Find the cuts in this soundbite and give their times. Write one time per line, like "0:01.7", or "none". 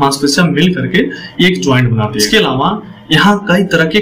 0:02.3

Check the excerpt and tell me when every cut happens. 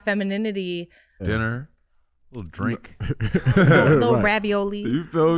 0:01.2

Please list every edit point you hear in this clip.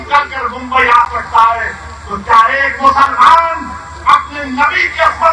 none

